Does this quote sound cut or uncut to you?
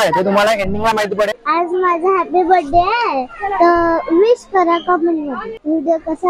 cut